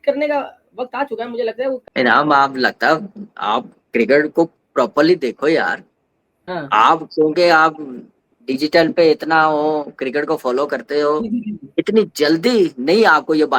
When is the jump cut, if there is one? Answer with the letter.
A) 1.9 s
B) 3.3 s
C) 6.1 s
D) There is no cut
A